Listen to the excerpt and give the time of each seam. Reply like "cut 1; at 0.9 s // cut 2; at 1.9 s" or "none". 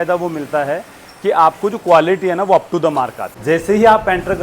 cut 1; at 3.2 s